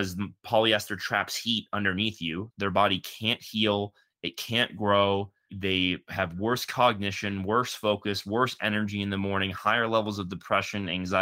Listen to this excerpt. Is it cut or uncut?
cut